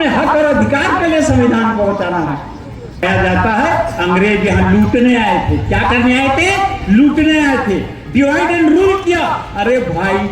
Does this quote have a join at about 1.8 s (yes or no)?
no